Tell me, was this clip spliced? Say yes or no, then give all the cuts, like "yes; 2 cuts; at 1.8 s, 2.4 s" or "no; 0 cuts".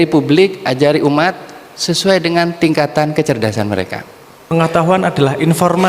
yes; 1 cut; at 4.5 s